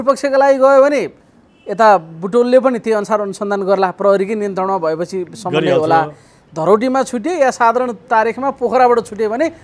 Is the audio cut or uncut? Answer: uncut